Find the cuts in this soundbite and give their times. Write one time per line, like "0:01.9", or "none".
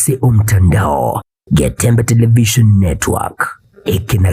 0:01.3